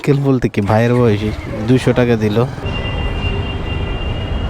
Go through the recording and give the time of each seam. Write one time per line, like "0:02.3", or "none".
0:02.7